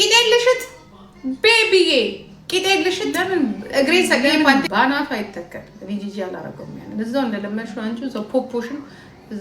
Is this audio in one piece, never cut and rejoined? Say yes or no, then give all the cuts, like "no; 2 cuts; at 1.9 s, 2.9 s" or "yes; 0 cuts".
no; 1 cut; at 4.2 s